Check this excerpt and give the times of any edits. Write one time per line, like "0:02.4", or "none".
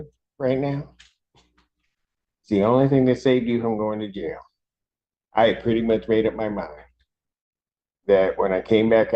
none